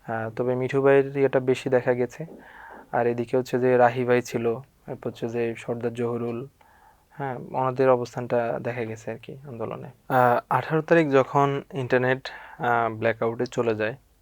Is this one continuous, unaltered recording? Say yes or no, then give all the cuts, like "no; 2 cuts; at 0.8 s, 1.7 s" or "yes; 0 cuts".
no; 1 cut; at 9.9 s